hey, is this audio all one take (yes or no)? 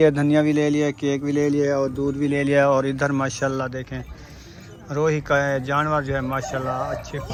yes